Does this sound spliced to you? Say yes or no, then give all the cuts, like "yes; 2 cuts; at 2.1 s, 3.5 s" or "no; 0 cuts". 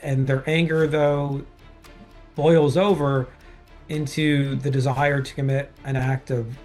no; 0 cuts